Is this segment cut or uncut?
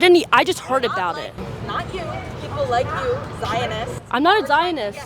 uncut